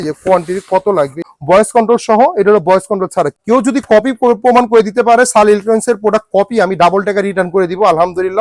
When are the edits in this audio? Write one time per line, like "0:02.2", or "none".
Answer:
0:01.3
0:03.3